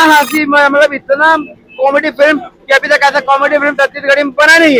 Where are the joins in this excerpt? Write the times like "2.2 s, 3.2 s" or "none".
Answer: none